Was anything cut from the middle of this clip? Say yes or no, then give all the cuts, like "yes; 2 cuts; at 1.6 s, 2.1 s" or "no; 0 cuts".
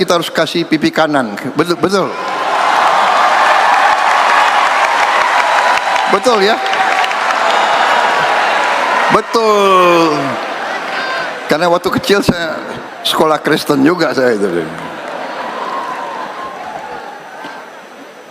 no; 0 cuts